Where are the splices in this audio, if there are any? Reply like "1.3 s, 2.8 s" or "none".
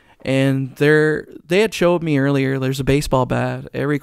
none